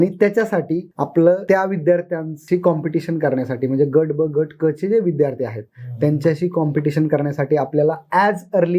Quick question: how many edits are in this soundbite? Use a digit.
2